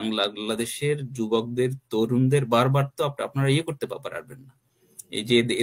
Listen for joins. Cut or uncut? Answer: uncut